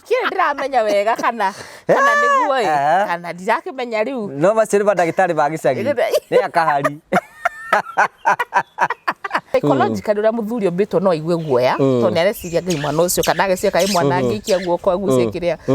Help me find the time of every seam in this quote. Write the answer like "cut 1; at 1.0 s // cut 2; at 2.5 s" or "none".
cut 1; at 9.3 s